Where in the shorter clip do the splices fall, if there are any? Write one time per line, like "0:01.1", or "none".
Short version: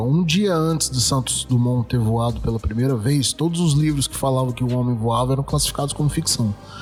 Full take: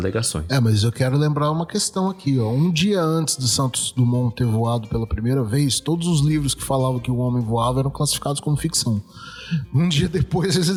none